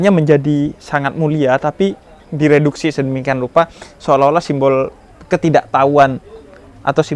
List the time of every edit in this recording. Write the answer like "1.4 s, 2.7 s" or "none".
none

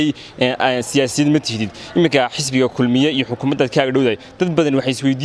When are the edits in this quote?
none

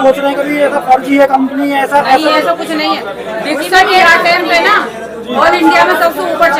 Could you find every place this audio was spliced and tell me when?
none

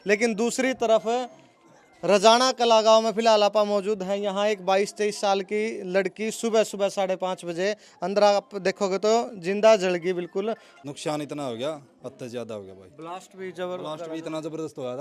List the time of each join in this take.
10.7 s

